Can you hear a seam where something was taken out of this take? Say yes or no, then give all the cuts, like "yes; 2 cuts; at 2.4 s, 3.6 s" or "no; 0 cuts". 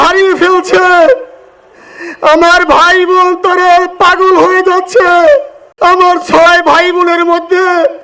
yes; 1 cut; at 5.6 s